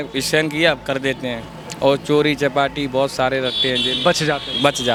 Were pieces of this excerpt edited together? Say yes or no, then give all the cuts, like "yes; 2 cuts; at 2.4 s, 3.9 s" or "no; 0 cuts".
no; 0 cuts